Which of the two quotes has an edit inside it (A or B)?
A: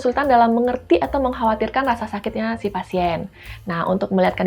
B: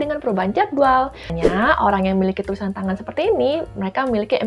B